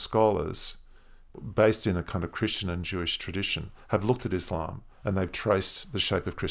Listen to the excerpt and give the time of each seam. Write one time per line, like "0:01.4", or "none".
0:01.3